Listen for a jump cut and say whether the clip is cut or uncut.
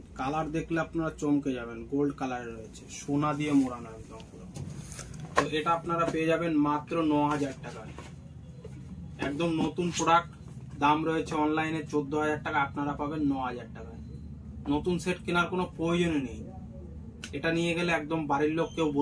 uncut